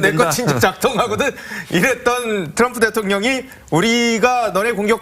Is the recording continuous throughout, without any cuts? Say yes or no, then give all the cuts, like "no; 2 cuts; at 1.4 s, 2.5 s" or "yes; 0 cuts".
no; 1 cut; at 1.9 s